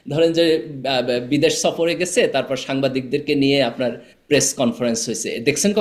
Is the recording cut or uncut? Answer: uncut